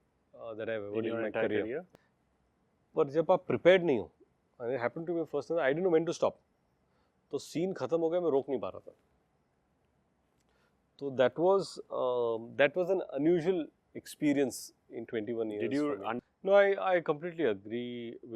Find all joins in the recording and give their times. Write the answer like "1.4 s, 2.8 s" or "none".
1.9 s, 16.2 s